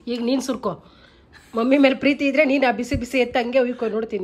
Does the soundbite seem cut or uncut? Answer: uncut